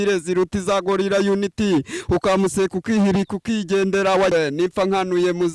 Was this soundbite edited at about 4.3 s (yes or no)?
yes